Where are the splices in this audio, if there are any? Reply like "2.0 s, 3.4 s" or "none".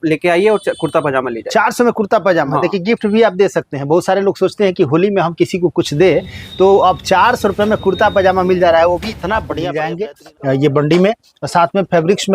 9.6 s